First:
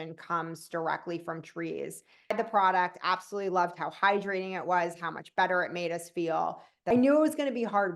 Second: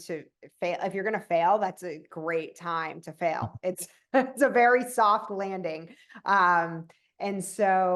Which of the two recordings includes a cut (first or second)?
first